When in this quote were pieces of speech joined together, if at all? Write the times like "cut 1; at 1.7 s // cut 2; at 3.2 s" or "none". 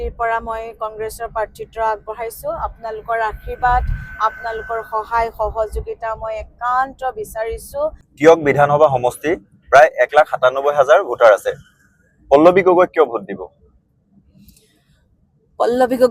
cut 1; at 8.0 s